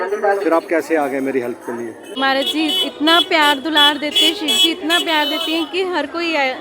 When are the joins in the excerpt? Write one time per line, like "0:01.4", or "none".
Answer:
0:02.0